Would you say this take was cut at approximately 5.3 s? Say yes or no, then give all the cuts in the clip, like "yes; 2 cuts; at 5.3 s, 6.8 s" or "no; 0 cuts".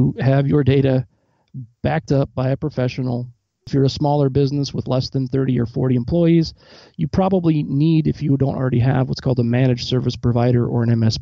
no; 1 cut; at 3.7 s